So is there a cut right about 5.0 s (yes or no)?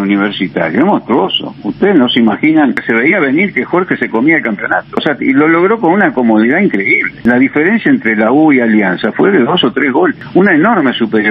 yes